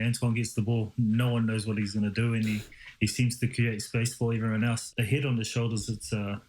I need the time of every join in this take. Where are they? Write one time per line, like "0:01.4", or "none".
0:04.9